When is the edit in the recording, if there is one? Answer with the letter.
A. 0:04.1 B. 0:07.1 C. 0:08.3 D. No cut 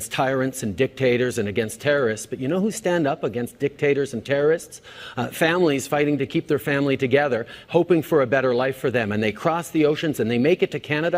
C